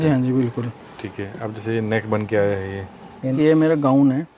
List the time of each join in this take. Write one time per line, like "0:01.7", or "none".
0:03.3